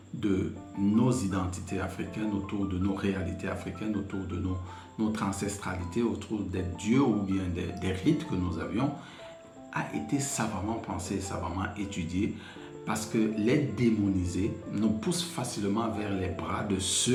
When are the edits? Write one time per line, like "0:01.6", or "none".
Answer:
none

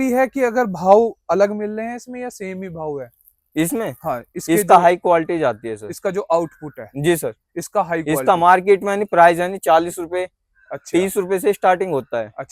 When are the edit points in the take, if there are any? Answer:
none

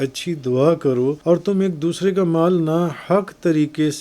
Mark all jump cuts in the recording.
0:01.2

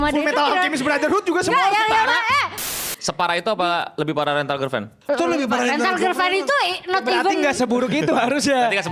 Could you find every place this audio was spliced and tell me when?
0:02.6
0:04.9

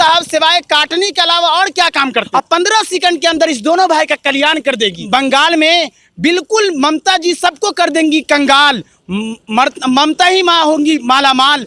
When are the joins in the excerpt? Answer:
0:02.3
0:05.0

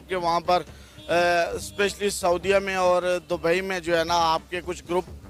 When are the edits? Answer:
none

